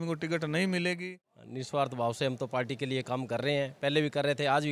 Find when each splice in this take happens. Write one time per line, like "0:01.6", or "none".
0:01.0